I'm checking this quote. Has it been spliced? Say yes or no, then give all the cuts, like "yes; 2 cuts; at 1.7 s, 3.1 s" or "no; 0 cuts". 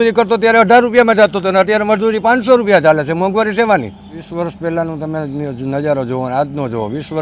yes; 1 cut; at 4.3 s